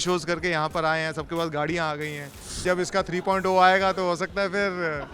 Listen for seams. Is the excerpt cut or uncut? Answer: cut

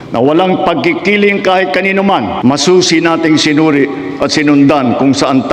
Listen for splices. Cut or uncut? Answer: cut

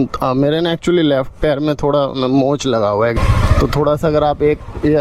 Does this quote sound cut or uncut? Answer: uncut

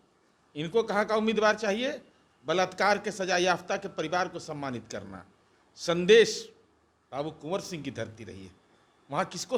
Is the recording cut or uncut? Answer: uncut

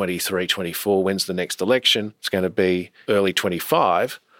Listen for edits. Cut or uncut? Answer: cut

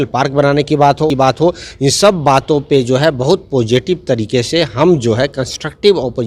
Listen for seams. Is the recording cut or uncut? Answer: cut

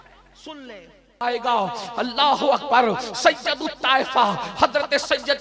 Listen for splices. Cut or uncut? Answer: cut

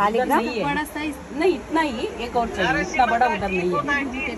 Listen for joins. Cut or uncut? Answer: uncut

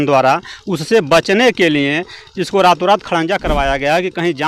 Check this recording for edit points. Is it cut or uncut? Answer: uncut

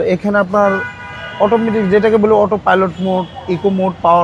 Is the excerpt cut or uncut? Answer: uncut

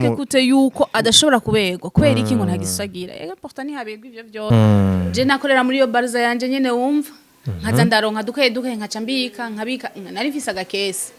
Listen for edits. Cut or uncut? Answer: cut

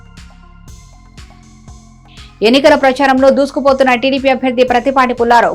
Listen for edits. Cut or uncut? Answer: cut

